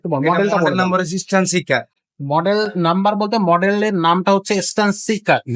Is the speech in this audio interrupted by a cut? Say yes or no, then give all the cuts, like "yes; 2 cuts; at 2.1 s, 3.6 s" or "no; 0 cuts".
no; 0 cuts